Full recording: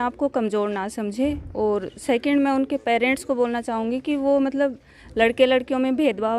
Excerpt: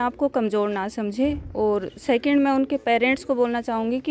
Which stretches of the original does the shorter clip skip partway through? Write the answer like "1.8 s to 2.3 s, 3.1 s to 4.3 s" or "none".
none